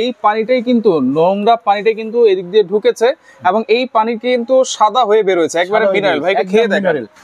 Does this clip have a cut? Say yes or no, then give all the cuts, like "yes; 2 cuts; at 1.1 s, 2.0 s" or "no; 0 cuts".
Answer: no; 0 cuts